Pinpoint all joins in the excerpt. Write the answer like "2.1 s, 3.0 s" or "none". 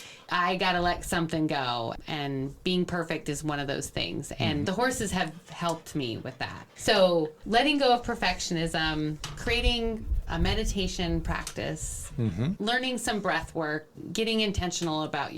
6.8 s, 12.6 s, 13.9 s